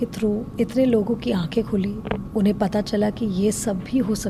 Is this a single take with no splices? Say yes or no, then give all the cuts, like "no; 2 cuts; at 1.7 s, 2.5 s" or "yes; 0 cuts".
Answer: yes; 0 cuts